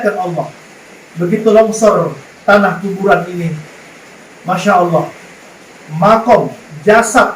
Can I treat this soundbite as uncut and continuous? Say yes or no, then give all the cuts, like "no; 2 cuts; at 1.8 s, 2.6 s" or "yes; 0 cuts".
yes; 0 cuts